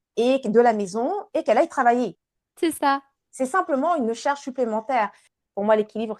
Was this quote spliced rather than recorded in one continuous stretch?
yes; 1 cut; at 5.3 s

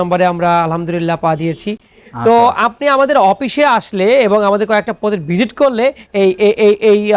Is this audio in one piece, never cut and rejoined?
yes; 0 cuts

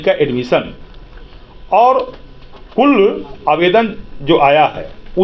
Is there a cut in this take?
no; 0 cuts

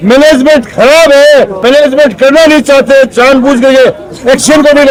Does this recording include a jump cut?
no; 0 cuts

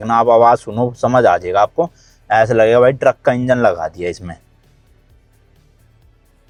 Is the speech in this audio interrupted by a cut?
no; 0 cuts

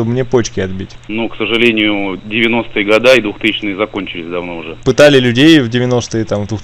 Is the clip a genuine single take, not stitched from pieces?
no; 1 cut; at 4.8 s

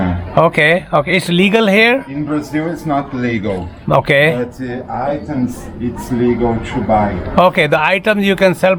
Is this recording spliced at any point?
no; 0 cuts

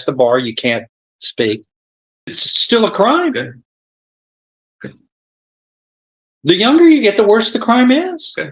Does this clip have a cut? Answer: yes; 1 cut; at 2.5 s

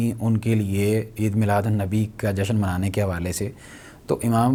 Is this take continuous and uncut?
yes; 0 cuts

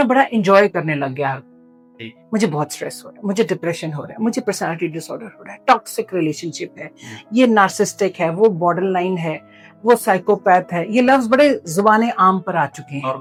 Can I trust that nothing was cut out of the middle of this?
yes; 0 cuts

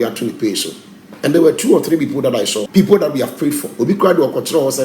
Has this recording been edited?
yes; 1 cut; at 2.6 s

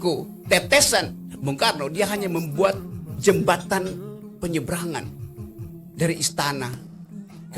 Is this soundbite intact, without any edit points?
yes; 0 cuts

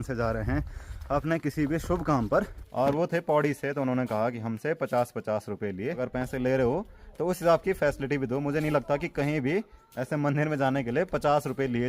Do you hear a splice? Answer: yes; 2 cuts; at 2.6 s, 6.0 s

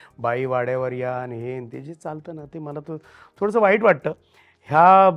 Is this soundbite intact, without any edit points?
yes; 0 cuts

